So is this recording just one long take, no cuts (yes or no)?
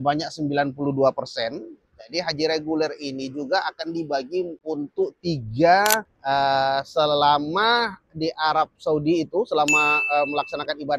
no